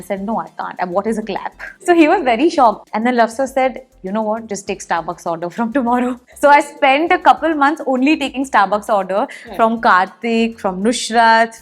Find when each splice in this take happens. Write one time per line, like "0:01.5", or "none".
0:01.7
0:02.8
0:06.3